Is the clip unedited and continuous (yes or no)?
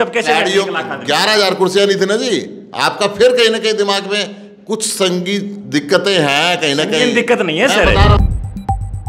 no